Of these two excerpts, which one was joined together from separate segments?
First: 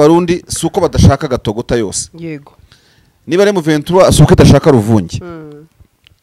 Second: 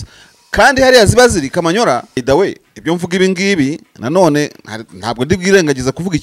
second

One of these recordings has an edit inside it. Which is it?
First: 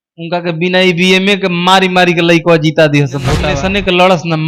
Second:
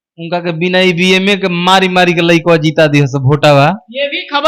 first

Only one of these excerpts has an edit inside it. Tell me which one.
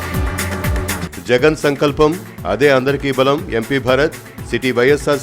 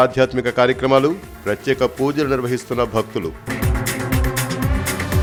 first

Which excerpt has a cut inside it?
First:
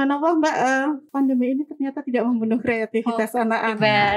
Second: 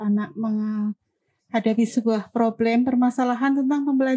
first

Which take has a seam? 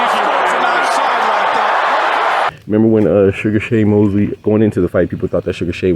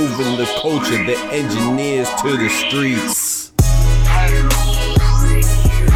first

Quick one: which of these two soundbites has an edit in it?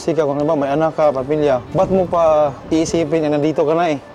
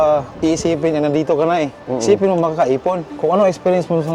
second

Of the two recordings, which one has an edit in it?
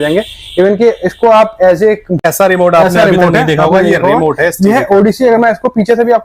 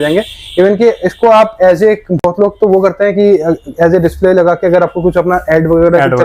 first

